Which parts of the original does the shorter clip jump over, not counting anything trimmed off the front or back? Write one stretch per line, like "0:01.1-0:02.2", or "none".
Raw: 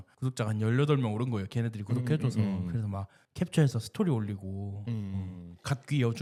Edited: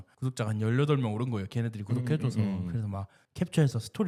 none